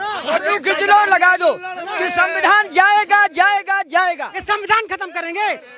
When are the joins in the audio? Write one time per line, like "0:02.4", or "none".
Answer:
0:04.3